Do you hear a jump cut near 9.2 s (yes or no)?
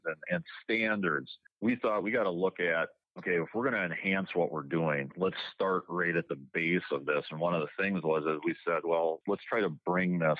yes